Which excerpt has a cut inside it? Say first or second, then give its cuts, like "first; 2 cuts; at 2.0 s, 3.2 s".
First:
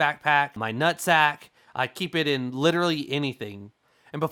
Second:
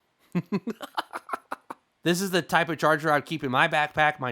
second; 1 cut; at 2.0 s